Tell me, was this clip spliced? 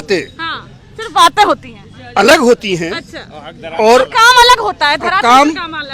no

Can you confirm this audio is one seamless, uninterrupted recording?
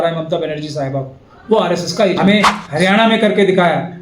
no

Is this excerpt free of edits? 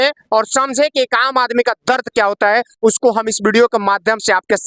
yes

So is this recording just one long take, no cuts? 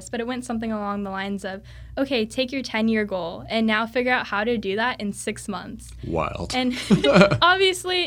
yes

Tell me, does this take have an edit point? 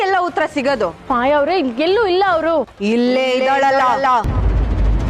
yes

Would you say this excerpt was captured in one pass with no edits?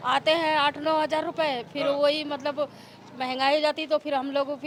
yes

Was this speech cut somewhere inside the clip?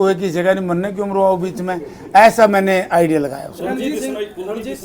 no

